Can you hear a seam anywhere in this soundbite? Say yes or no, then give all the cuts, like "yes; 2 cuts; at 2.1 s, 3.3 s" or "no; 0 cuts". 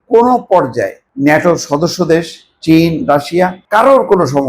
yes; 2 cuts; at 1.0 s, 3.6 s